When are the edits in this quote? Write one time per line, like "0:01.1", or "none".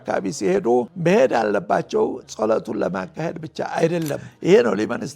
0:00.9
0:04.3